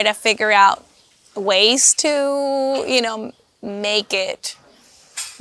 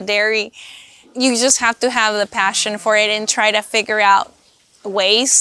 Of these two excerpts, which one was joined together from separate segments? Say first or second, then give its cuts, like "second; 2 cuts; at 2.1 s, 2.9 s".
second; 1 cut; at 1.1 s